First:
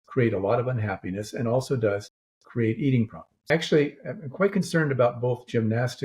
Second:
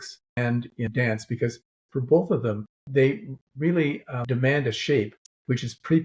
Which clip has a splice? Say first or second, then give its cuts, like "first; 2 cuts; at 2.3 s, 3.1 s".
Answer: first; 1 cut; at 3.4 s